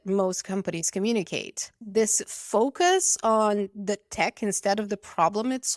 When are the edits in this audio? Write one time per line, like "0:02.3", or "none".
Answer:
0:01.7